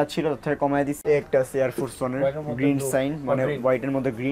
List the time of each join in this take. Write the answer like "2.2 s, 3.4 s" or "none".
1.0 s